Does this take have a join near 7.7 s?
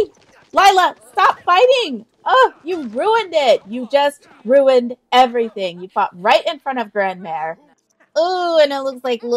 yes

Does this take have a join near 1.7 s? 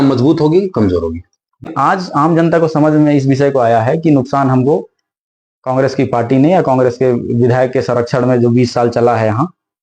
yes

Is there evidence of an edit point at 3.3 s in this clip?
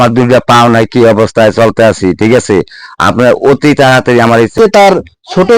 no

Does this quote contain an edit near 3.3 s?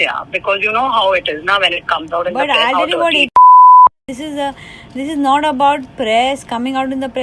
no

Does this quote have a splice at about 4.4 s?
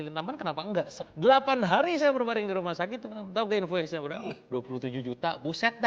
no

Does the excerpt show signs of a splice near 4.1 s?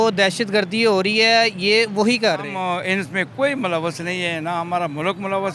no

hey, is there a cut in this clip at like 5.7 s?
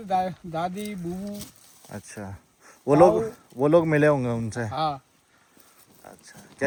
no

